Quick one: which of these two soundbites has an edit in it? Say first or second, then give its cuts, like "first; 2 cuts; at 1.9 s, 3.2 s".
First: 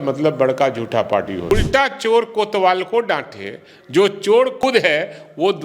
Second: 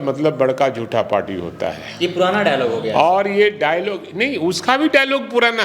first; 2 cuts; at 1.5 s, 4.6 s